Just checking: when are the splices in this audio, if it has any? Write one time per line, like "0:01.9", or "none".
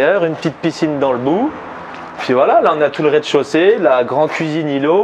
none